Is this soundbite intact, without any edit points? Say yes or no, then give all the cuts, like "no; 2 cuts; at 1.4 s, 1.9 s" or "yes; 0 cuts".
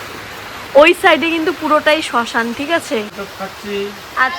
no; 1 cut; at 3.1 s